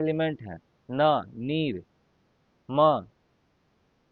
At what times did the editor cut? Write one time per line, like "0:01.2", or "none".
none